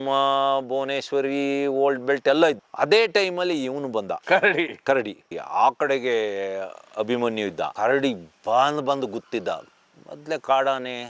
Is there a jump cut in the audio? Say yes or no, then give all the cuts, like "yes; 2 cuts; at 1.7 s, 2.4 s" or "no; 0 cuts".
yes; 1 cut; at 5.2 s